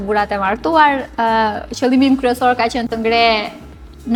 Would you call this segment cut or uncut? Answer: uncut